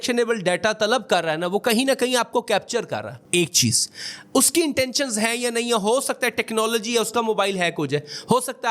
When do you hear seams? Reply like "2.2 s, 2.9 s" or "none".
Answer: none